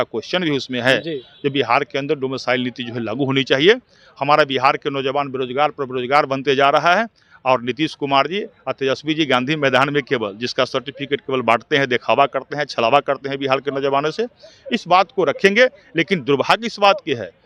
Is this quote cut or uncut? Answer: uncut